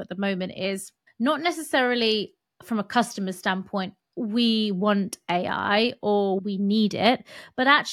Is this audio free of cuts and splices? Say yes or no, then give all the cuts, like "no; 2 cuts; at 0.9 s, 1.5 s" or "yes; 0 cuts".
no; 2 cuts; at 1.0 s, 6.4 s